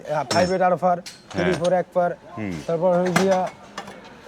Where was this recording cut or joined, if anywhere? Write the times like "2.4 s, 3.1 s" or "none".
none